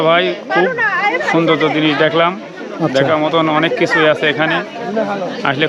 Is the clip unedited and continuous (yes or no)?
yes